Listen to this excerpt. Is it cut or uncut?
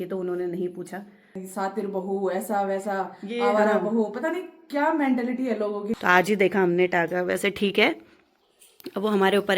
cut